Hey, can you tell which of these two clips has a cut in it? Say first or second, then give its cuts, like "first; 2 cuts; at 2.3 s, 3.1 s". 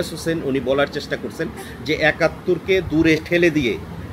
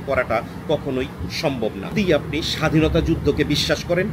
second; 1 cut; at 2.2 s